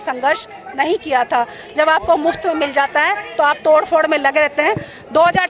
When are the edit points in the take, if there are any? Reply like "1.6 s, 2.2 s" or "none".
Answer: none